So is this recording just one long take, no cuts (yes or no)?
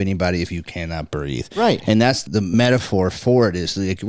no